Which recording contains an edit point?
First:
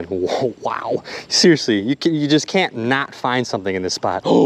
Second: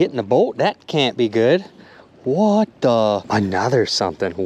second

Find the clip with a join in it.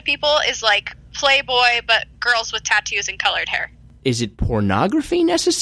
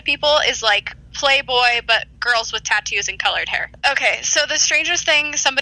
second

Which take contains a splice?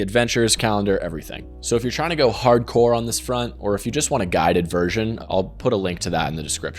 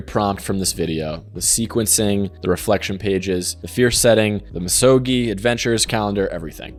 first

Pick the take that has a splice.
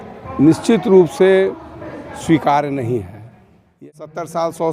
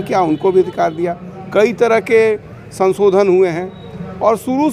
first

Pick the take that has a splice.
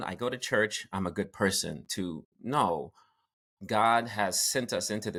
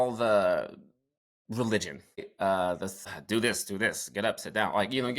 second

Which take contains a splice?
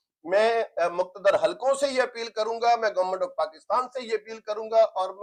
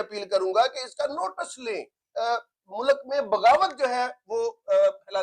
second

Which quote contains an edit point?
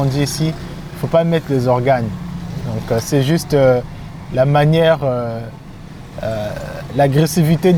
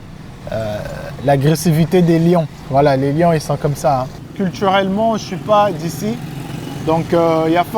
second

